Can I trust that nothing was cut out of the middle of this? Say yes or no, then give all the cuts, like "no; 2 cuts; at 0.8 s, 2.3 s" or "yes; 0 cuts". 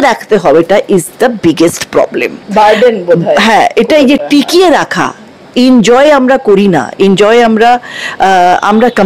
yes; 0 cuts